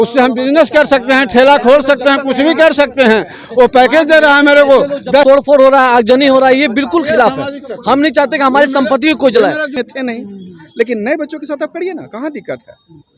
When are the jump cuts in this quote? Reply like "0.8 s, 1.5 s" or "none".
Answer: 5.2 s, 9.7 s